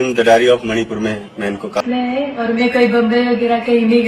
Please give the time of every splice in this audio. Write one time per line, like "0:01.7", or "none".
0:01.8